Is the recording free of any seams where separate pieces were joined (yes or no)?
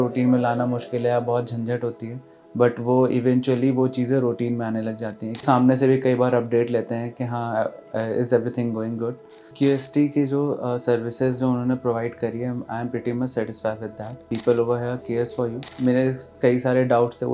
no